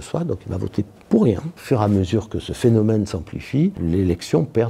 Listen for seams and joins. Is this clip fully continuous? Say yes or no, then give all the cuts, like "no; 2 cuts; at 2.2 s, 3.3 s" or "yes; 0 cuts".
no; 2 cuts; at 1.6 s, 3.8 s